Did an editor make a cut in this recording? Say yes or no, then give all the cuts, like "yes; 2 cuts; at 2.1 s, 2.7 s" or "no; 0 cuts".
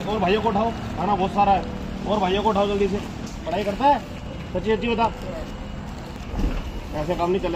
yes; 2 cuts; at 3.3 s, 6.1 s